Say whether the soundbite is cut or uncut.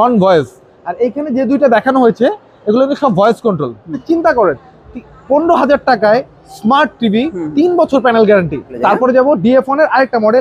cut